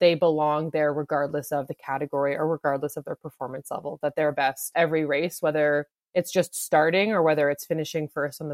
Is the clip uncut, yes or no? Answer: yes